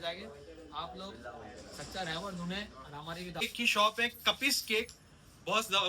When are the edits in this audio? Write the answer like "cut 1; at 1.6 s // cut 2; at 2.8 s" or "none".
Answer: cut 1; at 3.4 s

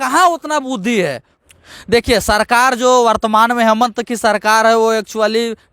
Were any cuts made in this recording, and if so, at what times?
cut 1; at 1.3 s

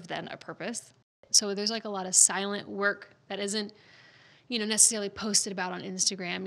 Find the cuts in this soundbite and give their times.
cut 1; at 1.1 s

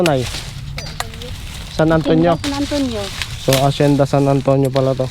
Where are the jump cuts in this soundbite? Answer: none

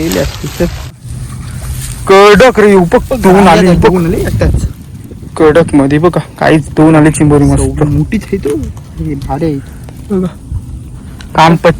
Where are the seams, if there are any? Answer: cut 1; at 1.2 s

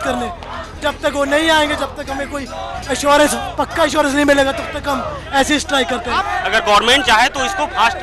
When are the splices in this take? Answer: cut 1; at 6.2 s

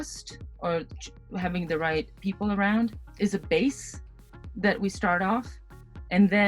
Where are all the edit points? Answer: cut 1; at 2.1 s // cut 2; at 3.0 s

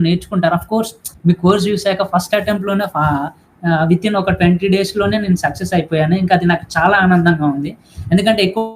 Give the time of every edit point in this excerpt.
cut 1; at 1.1 s

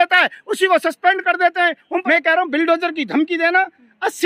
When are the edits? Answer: cut 1; at 2.0 s

